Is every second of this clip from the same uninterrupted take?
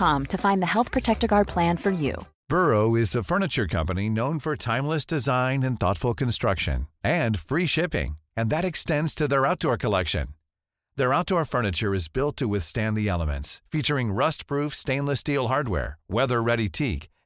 no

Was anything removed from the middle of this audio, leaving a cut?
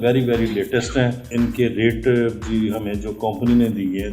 yes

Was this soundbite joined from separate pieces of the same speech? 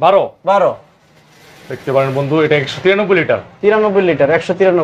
no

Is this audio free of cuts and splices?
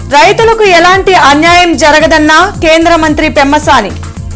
yes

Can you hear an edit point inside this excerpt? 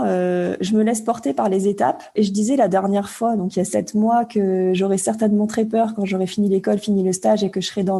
yes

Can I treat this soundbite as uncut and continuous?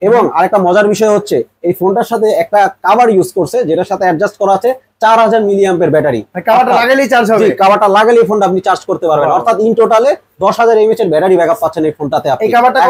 yes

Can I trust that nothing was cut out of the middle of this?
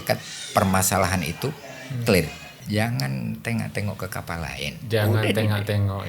no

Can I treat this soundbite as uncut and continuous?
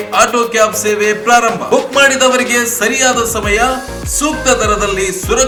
yes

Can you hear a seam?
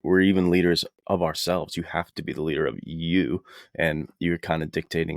yes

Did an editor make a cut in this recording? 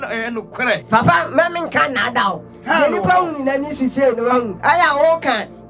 yes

